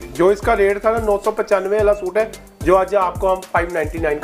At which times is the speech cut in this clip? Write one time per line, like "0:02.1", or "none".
none